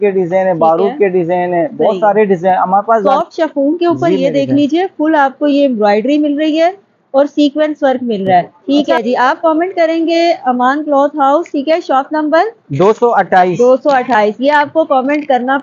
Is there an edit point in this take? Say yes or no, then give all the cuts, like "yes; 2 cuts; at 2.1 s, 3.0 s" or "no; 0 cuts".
yes; 2 cuts; at 3.1 s, 8.6 s